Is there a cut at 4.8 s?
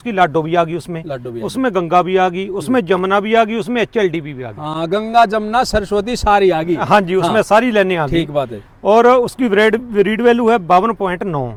no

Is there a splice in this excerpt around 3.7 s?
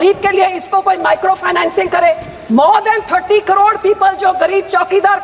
no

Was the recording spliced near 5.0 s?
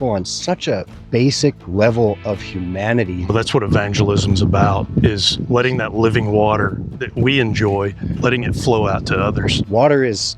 no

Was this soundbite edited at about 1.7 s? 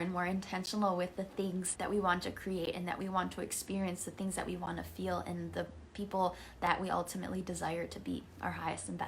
yes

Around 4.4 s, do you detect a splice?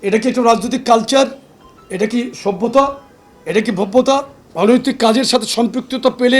yes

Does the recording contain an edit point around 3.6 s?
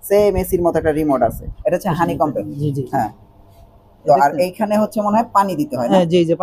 no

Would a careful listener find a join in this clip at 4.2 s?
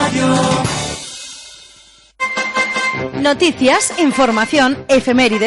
no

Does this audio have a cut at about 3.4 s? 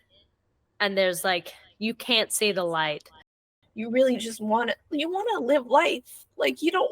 yes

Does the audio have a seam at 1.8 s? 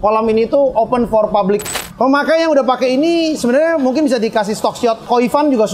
yes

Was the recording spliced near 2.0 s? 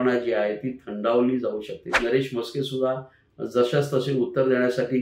yes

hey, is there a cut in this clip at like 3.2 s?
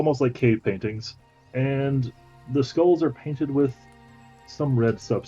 no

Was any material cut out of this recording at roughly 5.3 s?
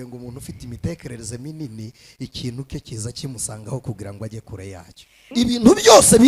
yes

